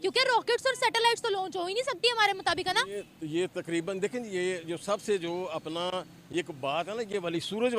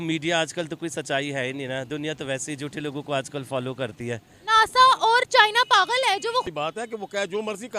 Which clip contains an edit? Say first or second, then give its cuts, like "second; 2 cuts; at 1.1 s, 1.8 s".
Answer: second; 1 cut; at 6.5 s